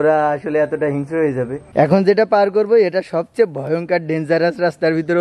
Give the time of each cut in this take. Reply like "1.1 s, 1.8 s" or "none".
1.7 s